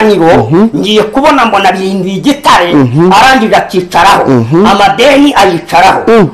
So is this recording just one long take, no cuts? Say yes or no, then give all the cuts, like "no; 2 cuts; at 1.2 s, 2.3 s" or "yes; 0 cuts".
yes; 0 cuts